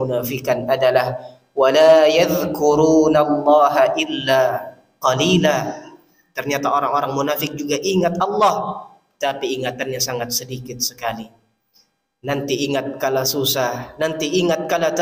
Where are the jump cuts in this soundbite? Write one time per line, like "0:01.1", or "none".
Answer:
none

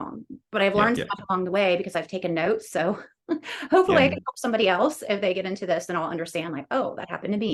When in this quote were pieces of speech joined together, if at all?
none

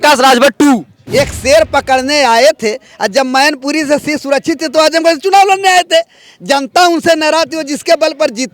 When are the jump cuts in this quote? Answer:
0:01.0

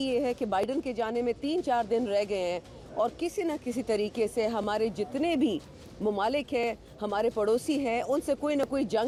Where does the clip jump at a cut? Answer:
none

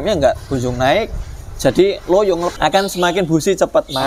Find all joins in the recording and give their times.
0:02.5

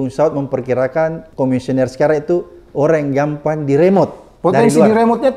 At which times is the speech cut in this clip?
0:01.2

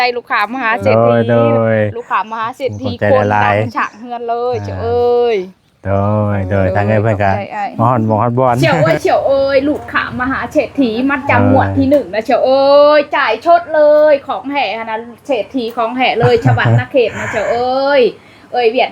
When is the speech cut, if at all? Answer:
0:08.6

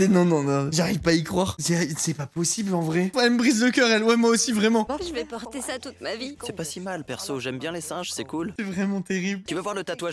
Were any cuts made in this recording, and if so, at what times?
none

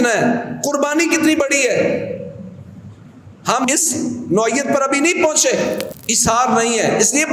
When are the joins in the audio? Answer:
0:03.6
0:06.0

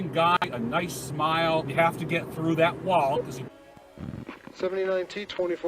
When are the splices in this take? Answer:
0:01.6

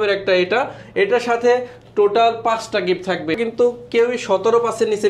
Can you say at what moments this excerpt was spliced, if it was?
0:03.4

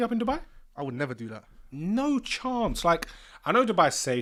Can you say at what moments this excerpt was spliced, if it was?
none

